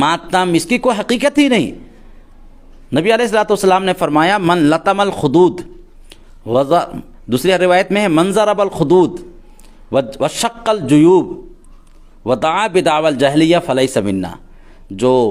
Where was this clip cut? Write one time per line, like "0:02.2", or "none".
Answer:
none